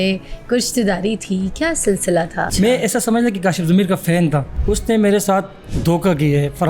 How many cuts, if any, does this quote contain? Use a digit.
3